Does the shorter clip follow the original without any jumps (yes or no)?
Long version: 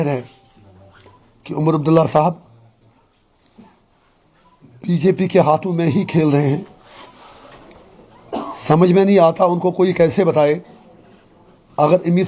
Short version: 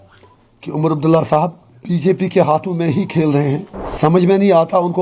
no